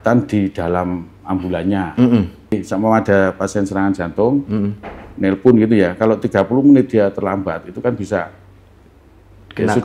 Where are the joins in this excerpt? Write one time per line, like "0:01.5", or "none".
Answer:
0:02.6

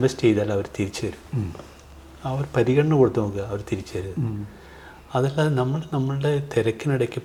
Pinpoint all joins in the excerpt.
none

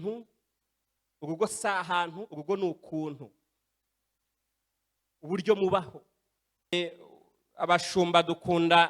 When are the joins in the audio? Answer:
0:06.7

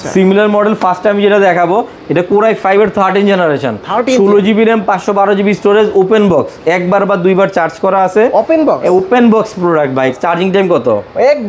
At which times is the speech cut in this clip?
0:10.2

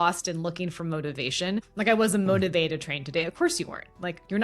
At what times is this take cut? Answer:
0:01.7

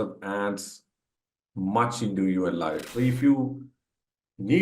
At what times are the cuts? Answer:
0:02.9

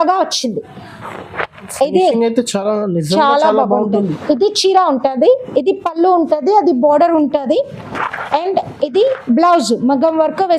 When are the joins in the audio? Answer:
0:04.0

